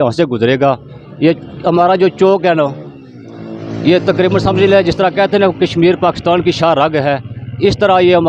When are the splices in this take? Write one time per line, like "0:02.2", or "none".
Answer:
none